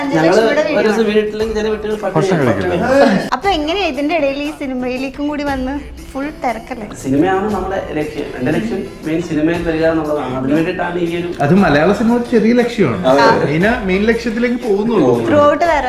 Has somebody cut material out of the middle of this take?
yes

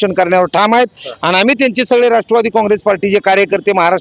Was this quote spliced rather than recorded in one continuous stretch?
no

